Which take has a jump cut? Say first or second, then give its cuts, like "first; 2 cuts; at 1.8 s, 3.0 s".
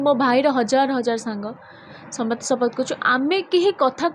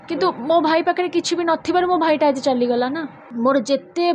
second; 1 cut; at 3.2 s